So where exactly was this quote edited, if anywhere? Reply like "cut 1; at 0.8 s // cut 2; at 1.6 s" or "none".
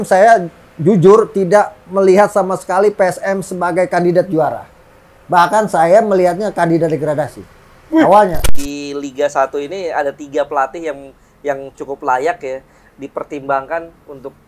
cut 1; at 8.4 s